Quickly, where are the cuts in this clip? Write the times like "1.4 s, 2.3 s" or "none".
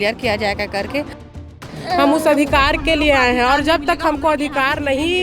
1.3 s